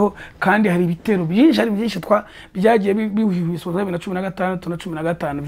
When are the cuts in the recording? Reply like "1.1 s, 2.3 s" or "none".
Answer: none